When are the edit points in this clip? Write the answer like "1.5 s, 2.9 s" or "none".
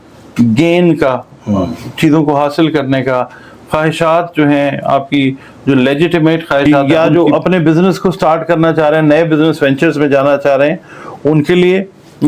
6.6 s